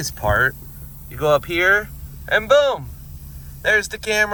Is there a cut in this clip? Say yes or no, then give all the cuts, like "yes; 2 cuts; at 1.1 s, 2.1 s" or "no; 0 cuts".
no; 0 cuts